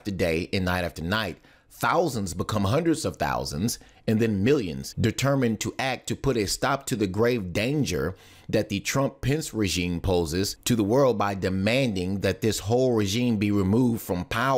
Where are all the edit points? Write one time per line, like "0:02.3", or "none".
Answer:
0:09.1